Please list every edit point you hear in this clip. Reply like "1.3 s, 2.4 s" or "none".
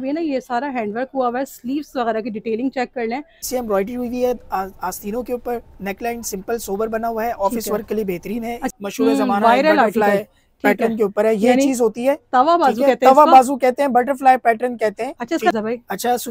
3.4 s, 8.6 s, 15.5 s